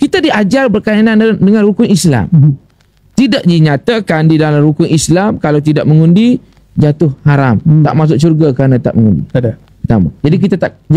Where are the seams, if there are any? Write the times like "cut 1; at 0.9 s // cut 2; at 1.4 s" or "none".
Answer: none